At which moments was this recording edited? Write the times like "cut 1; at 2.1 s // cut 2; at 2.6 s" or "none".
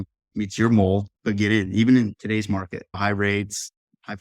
cut 1; at 1.1 s // cut 2; at 2.1 s